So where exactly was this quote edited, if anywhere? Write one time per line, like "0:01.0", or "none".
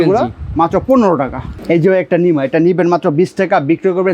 0:01.6